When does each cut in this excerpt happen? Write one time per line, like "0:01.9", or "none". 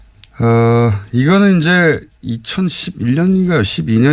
0:01.2